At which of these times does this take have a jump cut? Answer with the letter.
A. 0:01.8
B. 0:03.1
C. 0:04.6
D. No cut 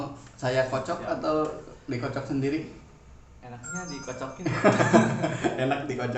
D